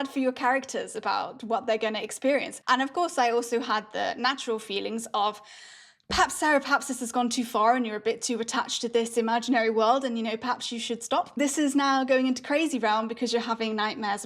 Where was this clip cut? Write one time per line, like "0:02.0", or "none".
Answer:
0:02.5
0:11.4

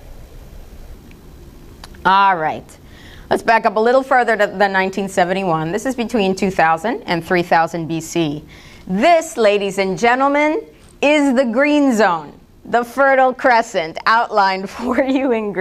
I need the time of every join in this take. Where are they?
0:12.3

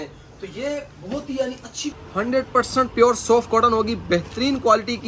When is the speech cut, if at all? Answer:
0:02.0

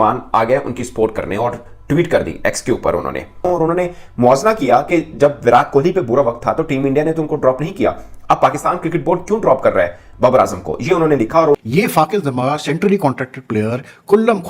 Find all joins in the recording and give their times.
0:11.6

